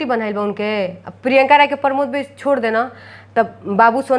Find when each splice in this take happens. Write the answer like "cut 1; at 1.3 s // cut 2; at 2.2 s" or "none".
none

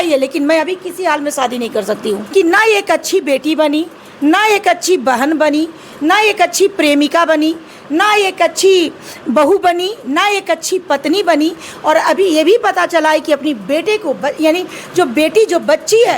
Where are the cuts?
cut 1; at 2.2 s

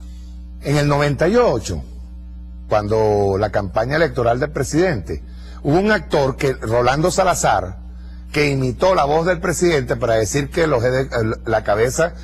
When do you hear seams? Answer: cut 1; at 10.3 s

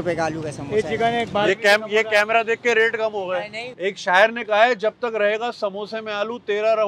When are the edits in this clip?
cut 1; at 3.7 s

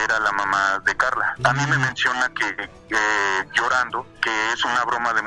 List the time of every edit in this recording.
cut 1; at 1.4 s // cut 2; at 4.1 s

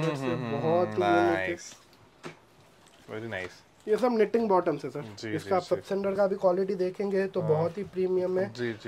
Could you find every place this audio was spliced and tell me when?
none

